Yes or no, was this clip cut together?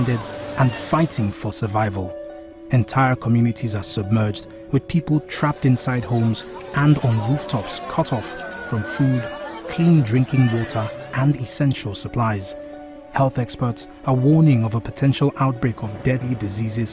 no